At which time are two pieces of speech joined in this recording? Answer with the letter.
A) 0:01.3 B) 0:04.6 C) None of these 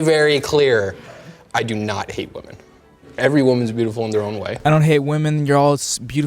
B